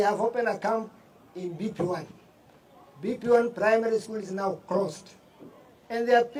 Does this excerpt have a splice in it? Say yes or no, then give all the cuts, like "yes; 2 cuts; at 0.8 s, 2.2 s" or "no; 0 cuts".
no; 0 cuts